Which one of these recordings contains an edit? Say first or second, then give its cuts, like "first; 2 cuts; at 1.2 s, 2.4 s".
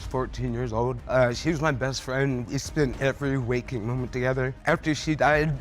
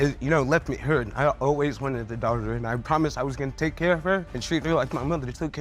first; 3 cuts; at 1.0 s, 2.9 s, 4.6 s